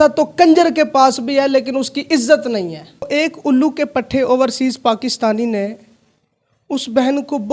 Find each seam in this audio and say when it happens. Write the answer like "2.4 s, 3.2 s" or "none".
3.1 s